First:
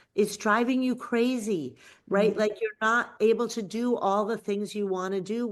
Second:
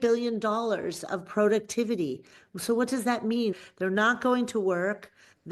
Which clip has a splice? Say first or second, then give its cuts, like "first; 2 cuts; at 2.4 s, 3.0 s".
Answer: second; 1 cut; at 3.5 s